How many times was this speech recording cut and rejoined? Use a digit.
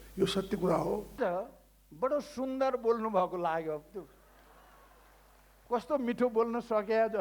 1